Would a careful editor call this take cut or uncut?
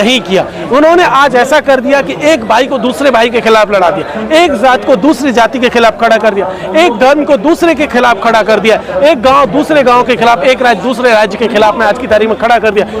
uncut